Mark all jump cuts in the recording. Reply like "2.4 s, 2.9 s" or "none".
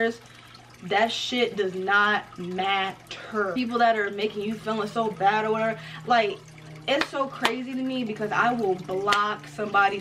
none